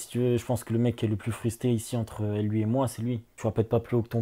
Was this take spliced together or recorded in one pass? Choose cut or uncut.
cut